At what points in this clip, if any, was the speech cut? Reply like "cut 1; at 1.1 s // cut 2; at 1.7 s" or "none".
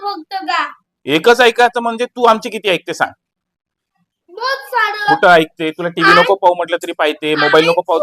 none